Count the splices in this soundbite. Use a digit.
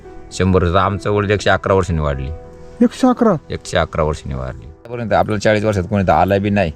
1